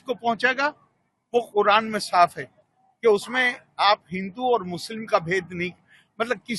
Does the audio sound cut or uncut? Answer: uncut